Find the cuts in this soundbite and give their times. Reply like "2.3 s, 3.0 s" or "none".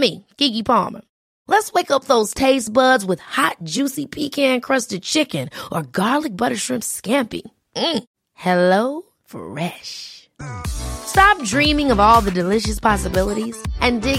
none